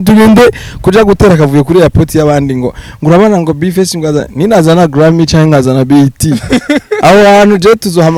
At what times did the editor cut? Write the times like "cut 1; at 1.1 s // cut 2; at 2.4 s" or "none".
none